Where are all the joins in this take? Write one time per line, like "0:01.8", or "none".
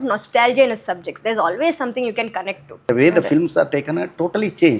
0:02.8